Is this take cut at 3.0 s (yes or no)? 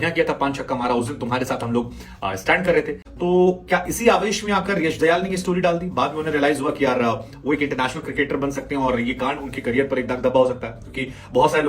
yes